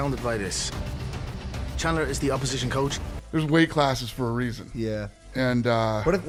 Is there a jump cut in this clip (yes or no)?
no